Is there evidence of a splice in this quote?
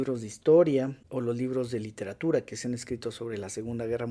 yes; 1 cut; at 1.0 s

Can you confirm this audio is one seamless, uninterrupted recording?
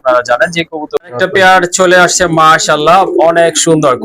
no; 1 cut; at 1.0 s

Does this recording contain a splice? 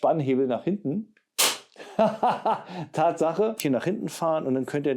yes; 1 cut; at 3.6 s

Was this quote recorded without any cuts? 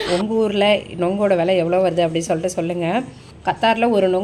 yes; 0 cuts

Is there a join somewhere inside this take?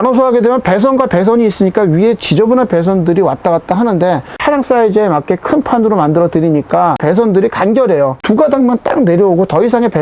yes; 3 cuts; at 4.4 s, 7.0 s, 8.2 s

